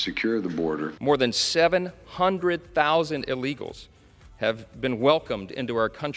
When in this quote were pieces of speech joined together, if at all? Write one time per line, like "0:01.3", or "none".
0:00.9